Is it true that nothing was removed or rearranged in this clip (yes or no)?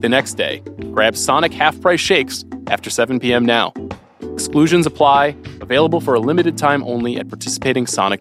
yes